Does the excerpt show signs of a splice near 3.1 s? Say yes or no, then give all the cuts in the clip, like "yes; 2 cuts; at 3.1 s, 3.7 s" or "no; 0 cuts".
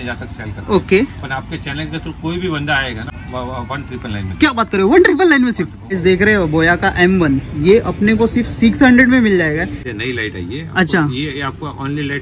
yes; 3 cuts; at 3.1 s, 5.9 s, 9.9 s